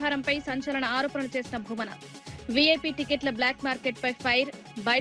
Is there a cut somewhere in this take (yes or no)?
no